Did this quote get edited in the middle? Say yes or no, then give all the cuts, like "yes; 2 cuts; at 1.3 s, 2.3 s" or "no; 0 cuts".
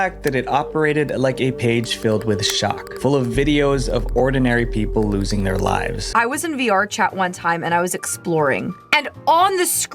yes; 2 cuts; at 6.0 s, 8.8 s